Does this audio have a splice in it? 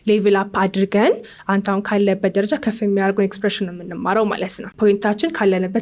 yes; 1 cut; at 4.6 s

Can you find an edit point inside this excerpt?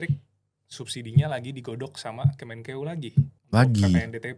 yes; 1 cut; at 3.4 s

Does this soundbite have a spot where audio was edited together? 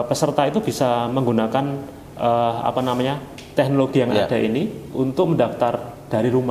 no; 0 cuts

